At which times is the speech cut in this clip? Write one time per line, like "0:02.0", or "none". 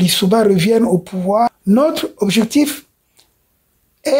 0:01.6